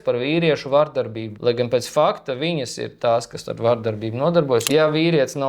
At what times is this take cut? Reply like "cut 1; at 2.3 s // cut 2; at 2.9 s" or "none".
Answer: cut 1; at 1.2 s // cut 2; at 4.7 s